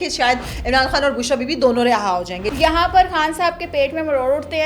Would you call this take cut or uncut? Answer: cut